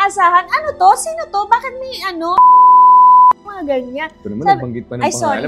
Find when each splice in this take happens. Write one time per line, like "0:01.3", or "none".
none